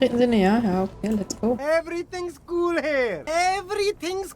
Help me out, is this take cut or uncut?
cut